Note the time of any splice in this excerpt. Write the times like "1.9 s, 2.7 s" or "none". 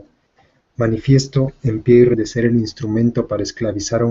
none